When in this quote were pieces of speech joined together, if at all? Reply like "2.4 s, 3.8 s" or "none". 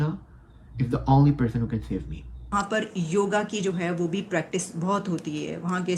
2.5 s